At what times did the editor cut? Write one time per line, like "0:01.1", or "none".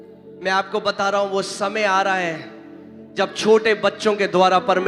none